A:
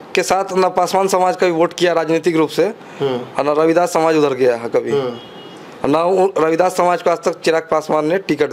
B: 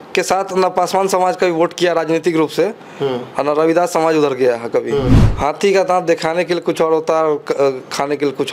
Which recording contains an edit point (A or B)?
B